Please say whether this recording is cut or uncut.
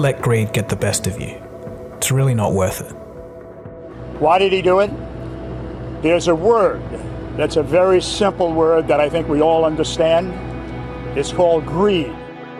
uncut